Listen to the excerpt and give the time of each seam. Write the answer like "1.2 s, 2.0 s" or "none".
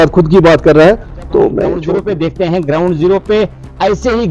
1.8 s

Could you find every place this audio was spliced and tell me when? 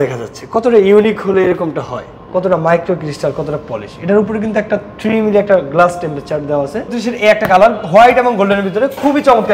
7.0 s

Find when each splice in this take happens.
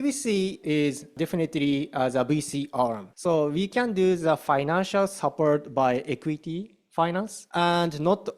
1.1 s, 3.1 s, 7.4 s

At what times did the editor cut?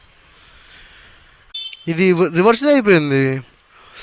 1.5 s

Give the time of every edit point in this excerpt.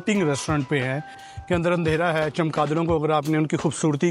1.2 s

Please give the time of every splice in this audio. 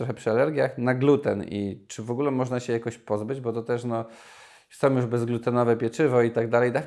none

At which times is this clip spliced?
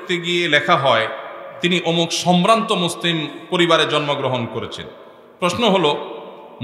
none

